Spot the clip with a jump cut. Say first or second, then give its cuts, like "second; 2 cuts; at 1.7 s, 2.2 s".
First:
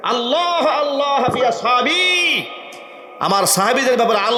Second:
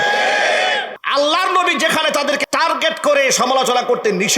second; 2 cuts; at 0.9 s, 2.4 s